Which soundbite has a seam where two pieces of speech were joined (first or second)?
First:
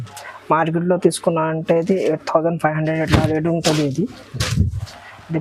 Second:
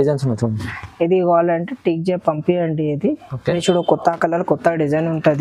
second